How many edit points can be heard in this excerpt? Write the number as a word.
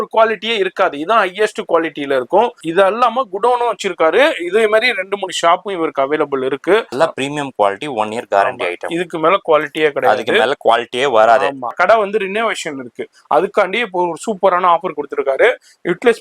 three